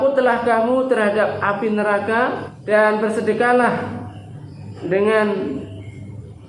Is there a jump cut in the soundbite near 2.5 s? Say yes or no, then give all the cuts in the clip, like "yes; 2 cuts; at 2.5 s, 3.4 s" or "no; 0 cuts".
yes; 1 cut; at 2.5 s